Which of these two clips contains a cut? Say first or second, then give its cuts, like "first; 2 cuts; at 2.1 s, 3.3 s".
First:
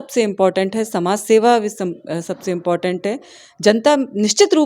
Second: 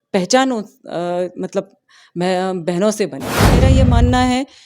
second; 1 cut; at 3.6 s